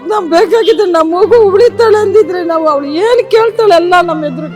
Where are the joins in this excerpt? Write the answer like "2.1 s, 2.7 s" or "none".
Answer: none

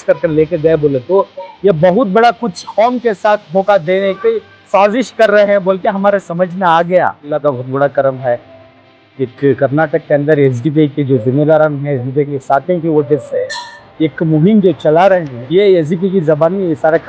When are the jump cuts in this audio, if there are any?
7.2 s, 15.3 s

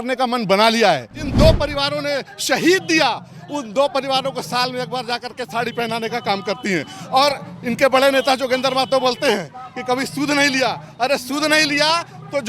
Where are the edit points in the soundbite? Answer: 1.2 s

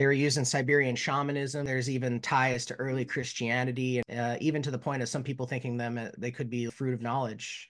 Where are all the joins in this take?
1.7 s, 4.0 s, 6.7 s

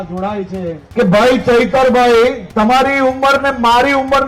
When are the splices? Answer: 0.8 s, 2.4 s

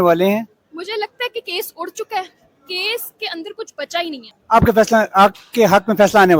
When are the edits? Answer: 4.3 s

